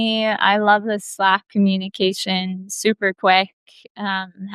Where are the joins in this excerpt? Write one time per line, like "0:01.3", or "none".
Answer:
none